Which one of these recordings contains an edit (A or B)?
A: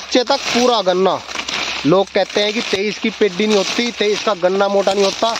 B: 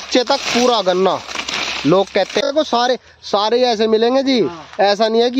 B